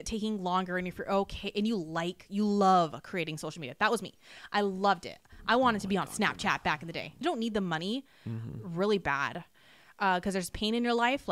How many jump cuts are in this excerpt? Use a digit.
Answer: 1